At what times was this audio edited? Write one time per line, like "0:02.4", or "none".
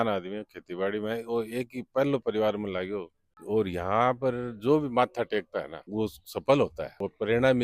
0:03.3